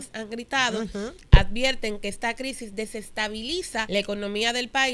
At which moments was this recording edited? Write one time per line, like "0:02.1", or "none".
0:03.9